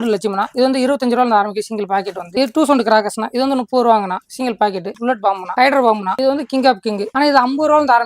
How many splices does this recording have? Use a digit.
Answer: 1